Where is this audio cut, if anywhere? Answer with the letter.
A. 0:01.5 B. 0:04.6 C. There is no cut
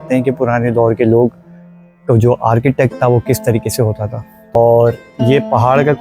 B